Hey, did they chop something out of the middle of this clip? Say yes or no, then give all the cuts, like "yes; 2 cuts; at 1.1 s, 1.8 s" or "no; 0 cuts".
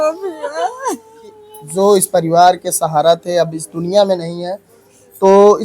yes; 1 cut; at 1.7 s